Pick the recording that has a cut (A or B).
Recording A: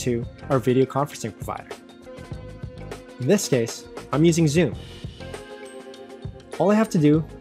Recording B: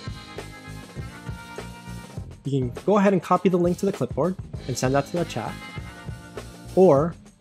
A